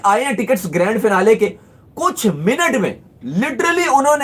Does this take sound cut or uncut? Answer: uncut